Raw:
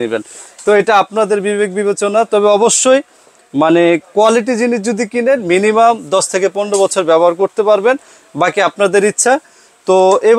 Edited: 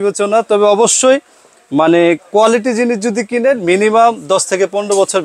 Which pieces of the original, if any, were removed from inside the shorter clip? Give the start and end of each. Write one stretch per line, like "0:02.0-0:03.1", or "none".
none